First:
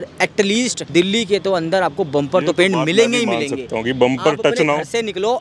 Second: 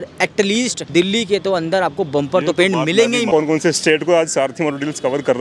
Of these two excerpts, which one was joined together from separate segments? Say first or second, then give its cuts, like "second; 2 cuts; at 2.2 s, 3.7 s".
second; 1 cut; at 3.3 s